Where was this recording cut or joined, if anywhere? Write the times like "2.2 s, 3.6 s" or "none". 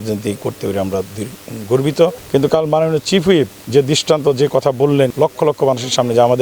2.2 s, 5.1 s